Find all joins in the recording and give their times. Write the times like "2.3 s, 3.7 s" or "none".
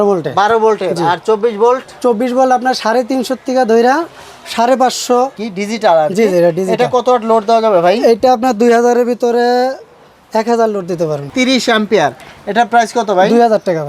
5.4 s, 11.3 s